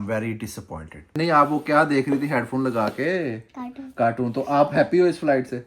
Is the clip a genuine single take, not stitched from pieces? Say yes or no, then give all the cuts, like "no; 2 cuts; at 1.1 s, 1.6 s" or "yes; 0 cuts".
no; 1 cut; at 1.2 s